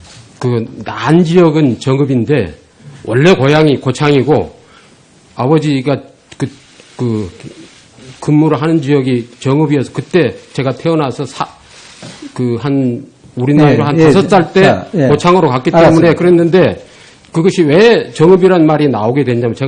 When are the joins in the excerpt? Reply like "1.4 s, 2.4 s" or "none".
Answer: 1.1 s